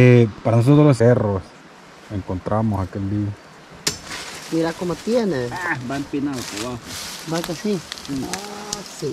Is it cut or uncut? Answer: cut